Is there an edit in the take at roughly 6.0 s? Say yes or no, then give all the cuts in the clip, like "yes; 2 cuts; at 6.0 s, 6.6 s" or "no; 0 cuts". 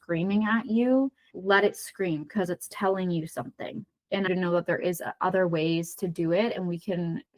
no; 2 cuts; at 1.3 s, 4.3 s